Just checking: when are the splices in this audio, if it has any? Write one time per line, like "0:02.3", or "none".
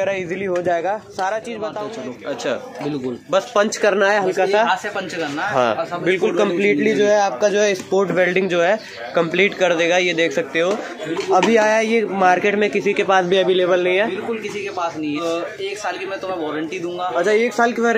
0:01.9
0:11.1
0:15.2